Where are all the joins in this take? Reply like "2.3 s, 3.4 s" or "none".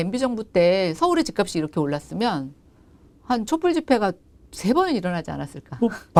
none